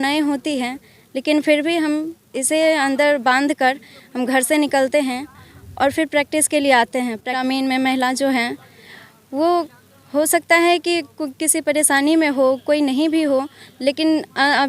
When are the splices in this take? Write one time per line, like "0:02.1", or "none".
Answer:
0:07.4